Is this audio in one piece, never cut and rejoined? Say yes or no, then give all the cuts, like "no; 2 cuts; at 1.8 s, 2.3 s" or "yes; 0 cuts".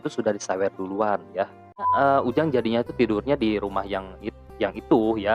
no; 1 cut; at 1.9 s